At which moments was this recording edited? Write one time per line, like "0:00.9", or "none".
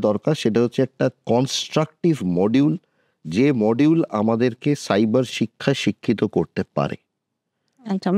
none

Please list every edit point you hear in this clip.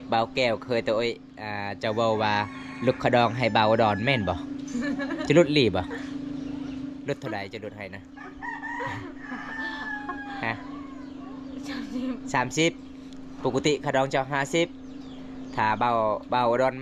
none

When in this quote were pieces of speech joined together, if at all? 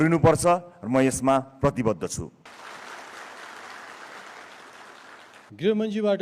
0:02.5
0:05.4

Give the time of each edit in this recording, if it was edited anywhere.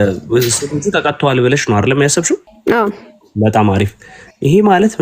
0:02.5

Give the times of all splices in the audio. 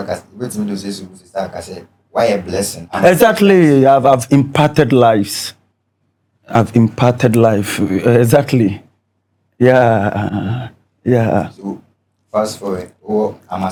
none

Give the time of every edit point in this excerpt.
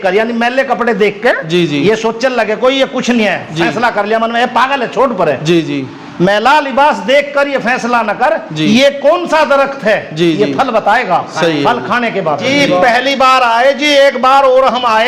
0:12.5

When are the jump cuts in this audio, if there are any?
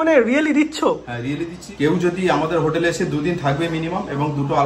0:01.6

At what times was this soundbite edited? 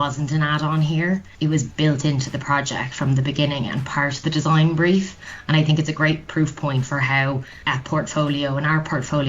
0:01.3
0:07.5

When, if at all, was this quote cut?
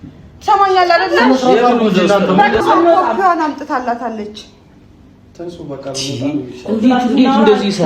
0:02.6

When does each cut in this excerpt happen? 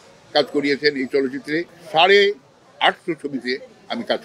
0:01.8

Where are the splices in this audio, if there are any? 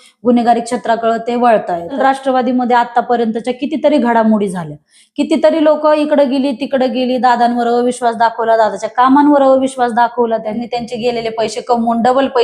0:01.9
0:10.6

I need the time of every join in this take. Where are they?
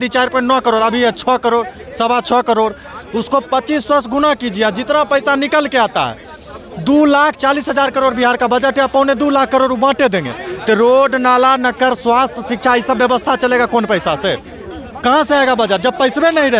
none

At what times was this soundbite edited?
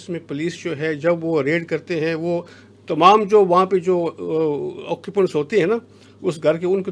none

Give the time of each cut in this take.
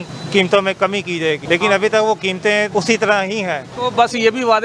0:01.4
0:02.7
0:03.7

